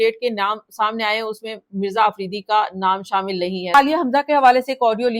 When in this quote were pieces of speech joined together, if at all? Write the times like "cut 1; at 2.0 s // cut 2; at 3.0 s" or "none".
cut 1; at 3.7 s